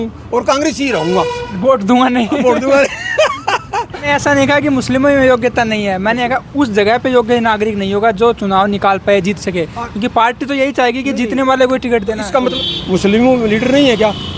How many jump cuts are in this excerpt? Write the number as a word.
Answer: two